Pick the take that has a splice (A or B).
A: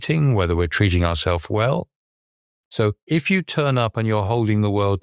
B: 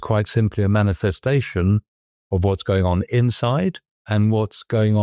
B